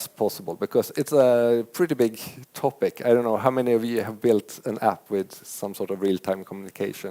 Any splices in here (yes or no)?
no